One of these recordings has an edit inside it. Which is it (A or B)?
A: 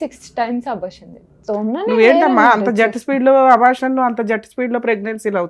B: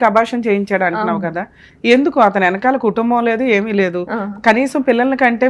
A